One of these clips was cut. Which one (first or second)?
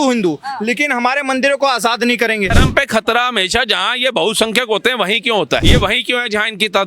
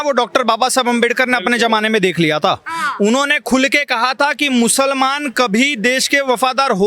first